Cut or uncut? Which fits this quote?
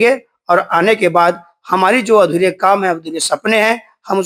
uncut